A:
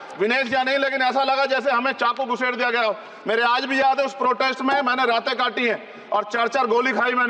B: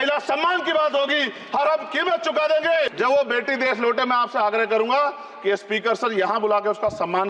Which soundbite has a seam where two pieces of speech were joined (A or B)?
B